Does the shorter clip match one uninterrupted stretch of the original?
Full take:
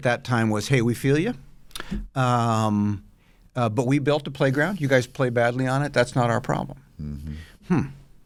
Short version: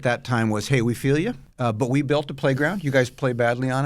no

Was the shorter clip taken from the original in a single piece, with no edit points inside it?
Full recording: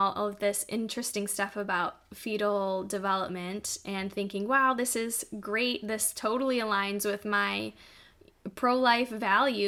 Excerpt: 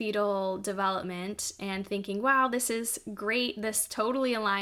yes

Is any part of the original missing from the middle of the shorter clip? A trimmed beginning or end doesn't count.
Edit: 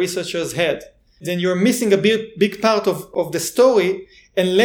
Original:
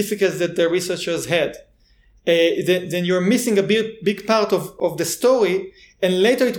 yes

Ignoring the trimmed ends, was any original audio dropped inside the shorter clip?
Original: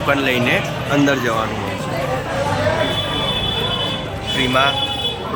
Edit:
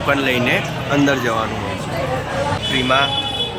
yes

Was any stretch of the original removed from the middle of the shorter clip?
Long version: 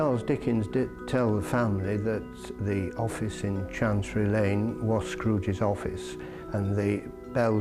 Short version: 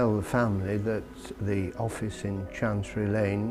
no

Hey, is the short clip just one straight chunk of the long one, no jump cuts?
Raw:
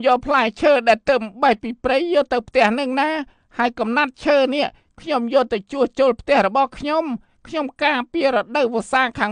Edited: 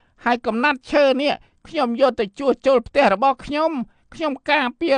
yes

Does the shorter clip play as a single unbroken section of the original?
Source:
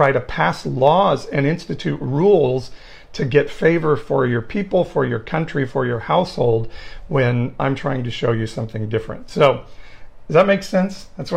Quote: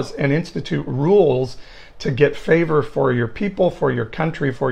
yes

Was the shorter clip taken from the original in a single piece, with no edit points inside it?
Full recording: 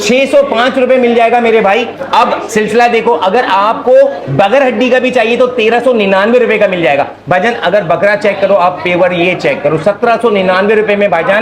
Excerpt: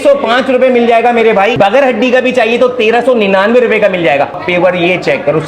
no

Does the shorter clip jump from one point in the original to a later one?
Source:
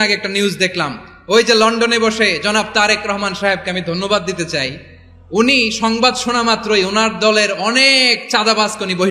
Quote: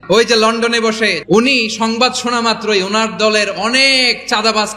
yes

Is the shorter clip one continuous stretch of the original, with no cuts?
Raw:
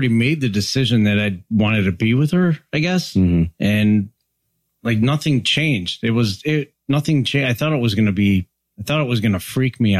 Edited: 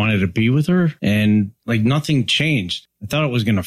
no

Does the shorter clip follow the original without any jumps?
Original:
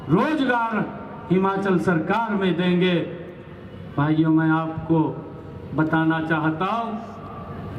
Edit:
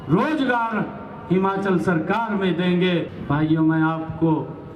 no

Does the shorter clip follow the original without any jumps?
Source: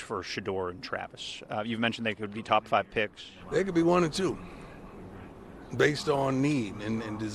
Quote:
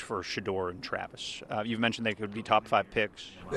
yes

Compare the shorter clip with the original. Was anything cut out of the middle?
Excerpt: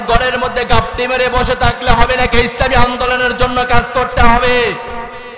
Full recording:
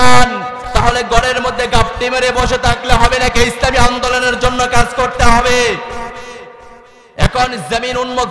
no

